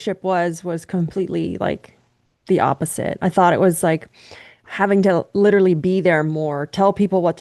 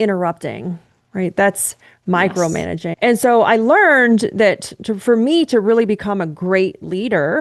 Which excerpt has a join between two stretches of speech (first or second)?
second